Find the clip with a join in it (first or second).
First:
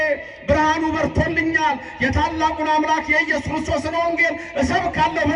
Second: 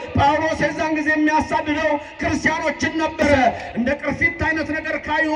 second